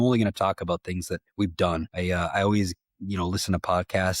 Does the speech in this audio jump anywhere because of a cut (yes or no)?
yes